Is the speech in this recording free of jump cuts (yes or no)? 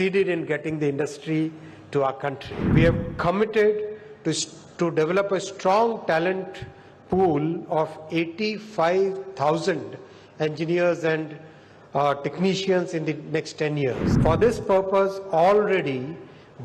no